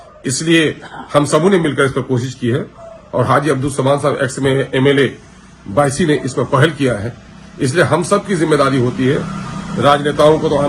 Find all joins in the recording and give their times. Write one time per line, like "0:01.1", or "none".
none